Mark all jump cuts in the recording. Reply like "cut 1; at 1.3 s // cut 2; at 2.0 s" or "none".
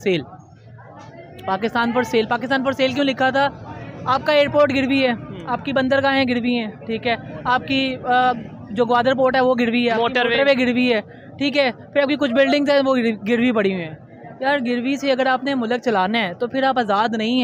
none